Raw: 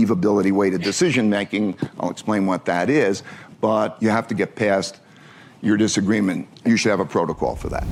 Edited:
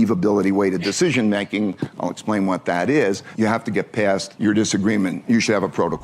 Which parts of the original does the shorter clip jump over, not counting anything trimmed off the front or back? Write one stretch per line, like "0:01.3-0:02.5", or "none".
0:03.3-0:03.9
0:04.9-0:05.5
0:06.4-0:06.5